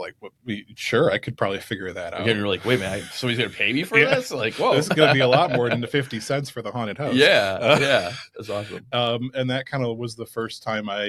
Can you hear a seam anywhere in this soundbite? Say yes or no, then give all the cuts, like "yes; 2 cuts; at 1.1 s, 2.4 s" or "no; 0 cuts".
no; 0 cuts